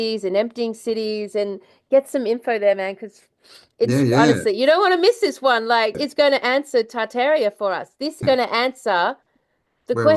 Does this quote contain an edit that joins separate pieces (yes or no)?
yes